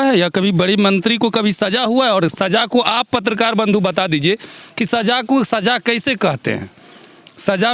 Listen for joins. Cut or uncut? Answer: uncut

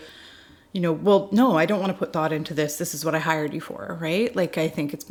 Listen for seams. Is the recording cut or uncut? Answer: uncut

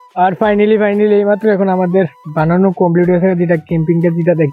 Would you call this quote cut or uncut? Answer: uncut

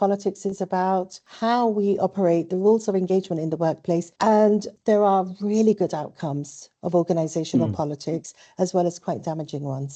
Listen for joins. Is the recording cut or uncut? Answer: uncut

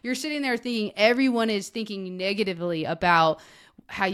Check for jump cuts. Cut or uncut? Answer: uncut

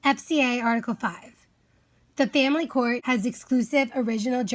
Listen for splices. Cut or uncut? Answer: cut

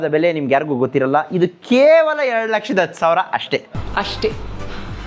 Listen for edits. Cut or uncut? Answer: cut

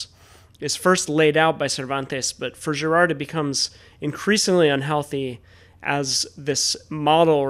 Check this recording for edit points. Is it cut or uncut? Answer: uncut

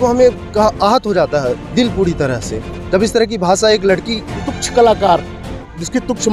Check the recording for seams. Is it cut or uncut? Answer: cut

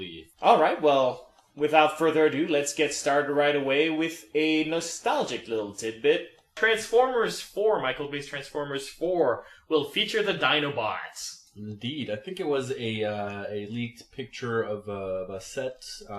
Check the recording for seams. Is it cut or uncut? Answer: cut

